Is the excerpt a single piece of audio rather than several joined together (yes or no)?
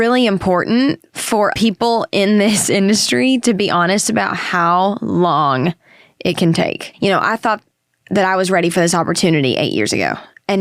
no